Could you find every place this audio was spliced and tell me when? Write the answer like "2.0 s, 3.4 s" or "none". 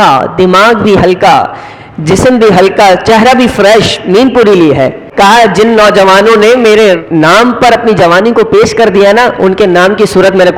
5.0 s, 7.0 s